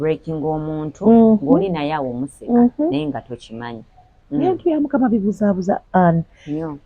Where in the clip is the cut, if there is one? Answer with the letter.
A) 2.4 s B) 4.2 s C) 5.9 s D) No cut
B